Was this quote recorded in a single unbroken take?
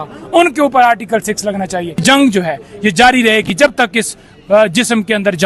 no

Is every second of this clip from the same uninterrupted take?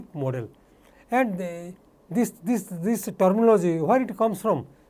yes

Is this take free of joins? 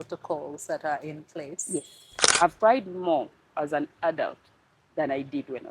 no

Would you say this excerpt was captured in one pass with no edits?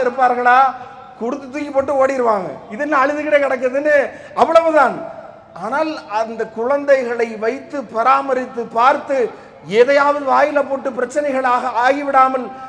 yes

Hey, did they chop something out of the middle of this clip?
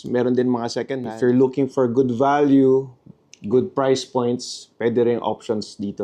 yes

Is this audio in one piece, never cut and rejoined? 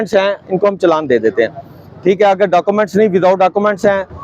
yes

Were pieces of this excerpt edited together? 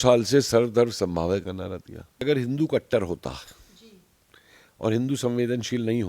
yes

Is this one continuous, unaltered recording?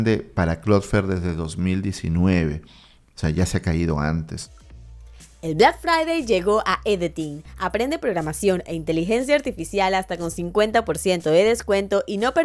no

